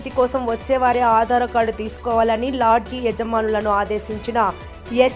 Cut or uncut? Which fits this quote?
uncut